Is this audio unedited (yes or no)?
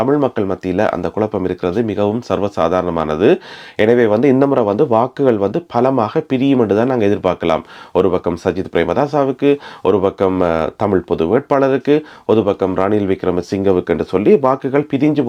yes